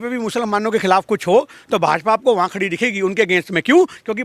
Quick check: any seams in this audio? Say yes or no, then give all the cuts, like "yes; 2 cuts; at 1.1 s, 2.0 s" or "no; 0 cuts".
no; 0 cuts